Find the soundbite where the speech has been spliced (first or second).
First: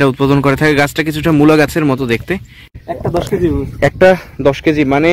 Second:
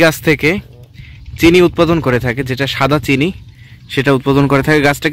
first